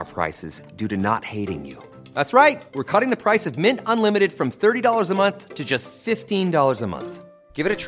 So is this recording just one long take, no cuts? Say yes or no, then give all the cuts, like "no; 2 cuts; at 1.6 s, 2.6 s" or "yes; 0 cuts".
yes; 0 cuts